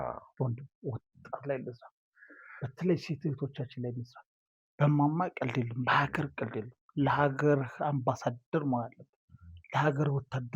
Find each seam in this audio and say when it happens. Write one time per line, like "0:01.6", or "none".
0:04.2